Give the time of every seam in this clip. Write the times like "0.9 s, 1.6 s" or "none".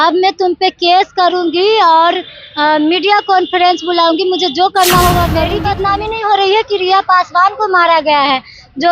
5.6 s